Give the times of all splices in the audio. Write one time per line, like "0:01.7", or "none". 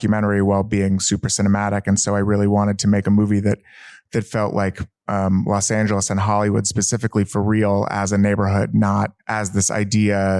0:09.2